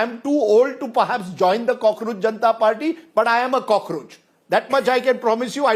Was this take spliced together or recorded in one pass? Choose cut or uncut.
uncut